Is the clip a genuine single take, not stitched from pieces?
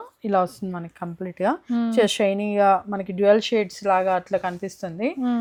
yes; 0 cuts

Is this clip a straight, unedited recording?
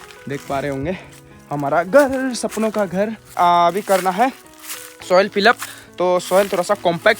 no; 1 cut; at 3.4 s

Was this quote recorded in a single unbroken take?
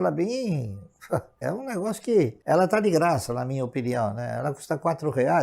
no; 2 cuts; at 1.4 s, 2.4 s

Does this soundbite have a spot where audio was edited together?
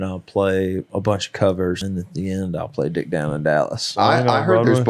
yes; 2 cuts; at 1.8 s, 3.9 s

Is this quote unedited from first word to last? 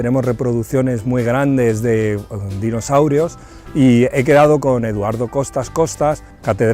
no; 1 cut; at 4.5 s

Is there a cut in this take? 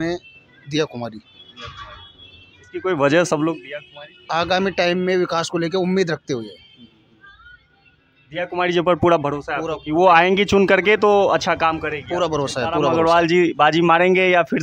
yes; 1 cut; at 12.9 s

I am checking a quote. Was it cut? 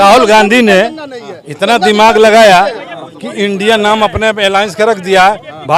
no; 0 cuts

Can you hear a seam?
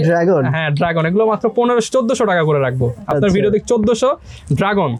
no; 0 cuts

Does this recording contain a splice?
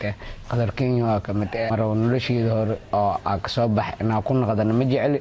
yes; 1 cut; at 1.7 s

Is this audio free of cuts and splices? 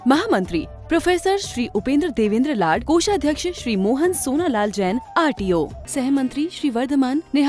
yes; 0 cuts

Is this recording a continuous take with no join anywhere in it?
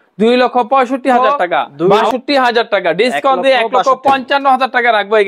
no; 1 cut; at 1.8 s

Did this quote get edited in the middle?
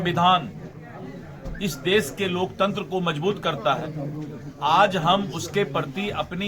no; 0 cuts

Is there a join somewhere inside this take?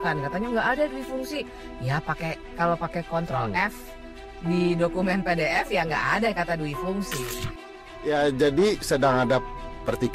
yes; 1 cut; at 7.6 s

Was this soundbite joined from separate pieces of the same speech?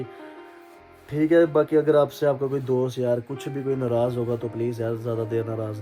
no; 0 cuts

